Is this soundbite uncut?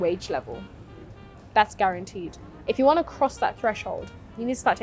yes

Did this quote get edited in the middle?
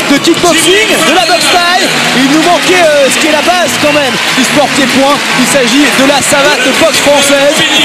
yes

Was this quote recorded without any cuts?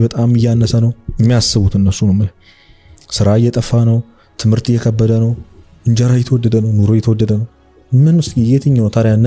yes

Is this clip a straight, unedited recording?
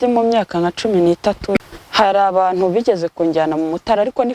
no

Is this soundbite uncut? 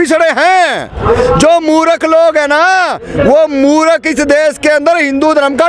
yes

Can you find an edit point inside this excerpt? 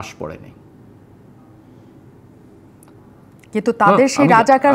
no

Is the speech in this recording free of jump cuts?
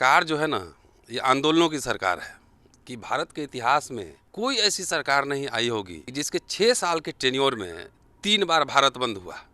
no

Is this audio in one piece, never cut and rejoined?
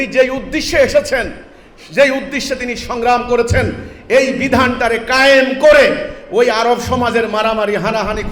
yes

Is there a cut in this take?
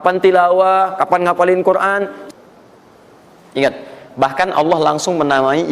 yes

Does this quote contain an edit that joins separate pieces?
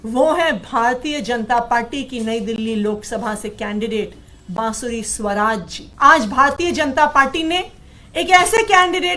yes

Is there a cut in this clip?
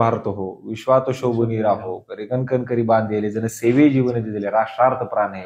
no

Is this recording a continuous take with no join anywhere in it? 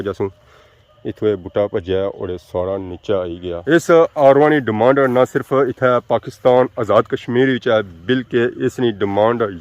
no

